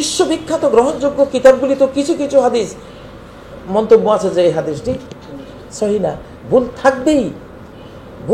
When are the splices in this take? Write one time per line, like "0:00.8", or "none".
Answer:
none